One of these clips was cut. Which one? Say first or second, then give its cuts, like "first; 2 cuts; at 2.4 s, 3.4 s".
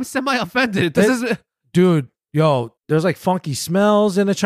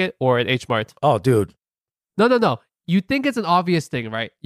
first; 1 cut; at 2.7 s